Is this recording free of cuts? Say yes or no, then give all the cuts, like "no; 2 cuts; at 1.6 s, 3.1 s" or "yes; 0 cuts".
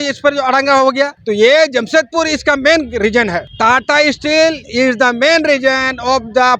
no; 2 cuts; at 1.2 s, 3.5 s